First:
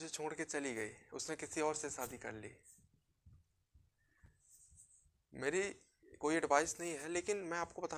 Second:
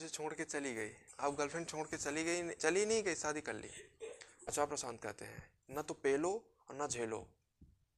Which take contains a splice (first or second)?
second